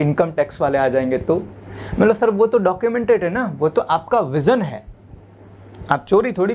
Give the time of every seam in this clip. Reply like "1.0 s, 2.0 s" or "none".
none